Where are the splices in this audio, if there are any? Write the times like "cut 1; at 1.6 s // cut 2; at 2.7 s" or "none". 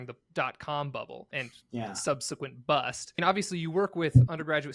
cut 1; at 1.3 s // cut 2; at 3.2 s